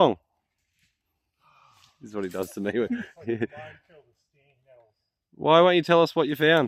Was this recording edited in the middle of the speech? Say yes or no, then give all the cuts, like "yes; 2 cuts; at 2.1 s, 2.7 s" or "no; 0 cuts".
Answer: no; 0 cuts